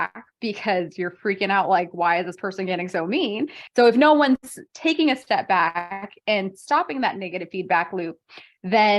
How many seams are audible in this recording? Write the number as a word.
one